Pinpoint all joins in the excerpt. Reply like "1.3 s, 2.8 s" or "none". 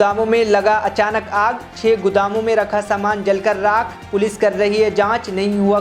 none